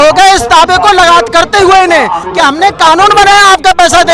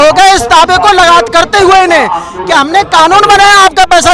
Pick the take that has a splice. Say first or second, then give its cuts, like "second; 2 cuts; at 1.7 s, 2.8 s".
first; 1 cut; at 2.2 s